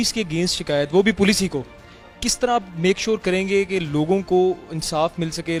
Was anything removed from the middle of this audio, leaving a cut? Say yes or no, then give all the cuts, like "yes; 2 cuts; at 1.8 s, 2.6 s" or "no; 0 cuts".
no; 0 cuts